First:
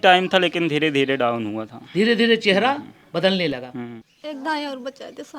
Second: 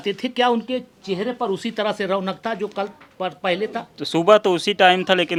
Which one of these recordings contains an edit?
first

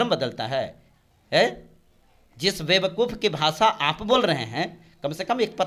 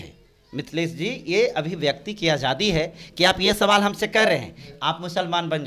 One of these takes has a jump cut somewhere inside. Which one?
second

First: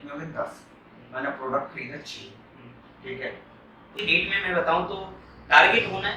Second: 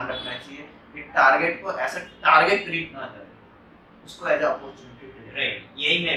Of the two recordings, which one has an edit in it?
first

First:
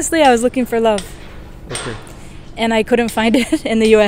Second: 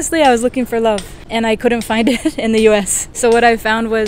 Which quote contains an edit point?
second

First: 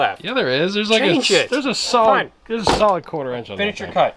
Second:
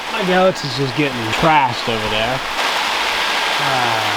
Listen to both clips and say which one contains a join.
second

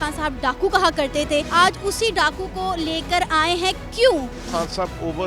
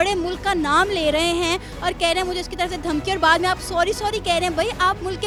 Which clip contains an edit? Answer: first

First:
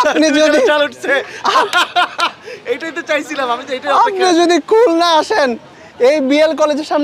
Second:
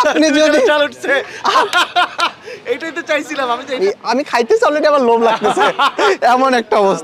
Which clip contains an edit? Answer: second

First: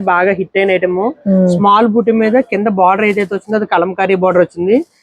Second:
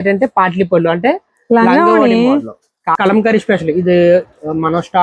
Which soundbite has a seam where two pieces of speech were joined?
second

